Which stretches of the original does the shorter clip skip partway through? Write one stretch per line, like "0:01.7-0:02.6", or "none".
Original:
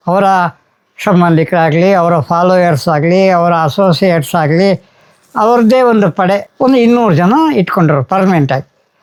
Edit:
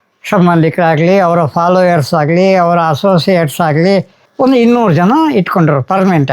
0:05.0-0:06.5